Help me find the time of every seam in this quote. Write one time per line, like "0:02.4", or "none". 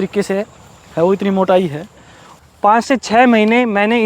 0:02.2